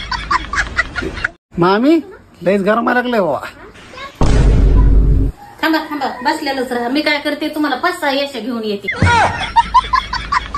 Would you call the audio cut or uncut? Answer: uncut